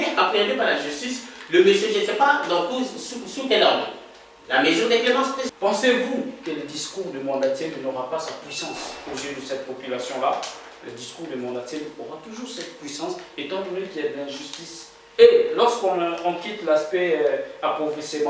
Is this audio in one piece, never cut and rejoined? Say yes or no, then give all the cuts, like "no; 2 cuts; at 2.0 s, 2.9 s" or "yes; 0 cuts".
no; 1 cut; at 5.4 s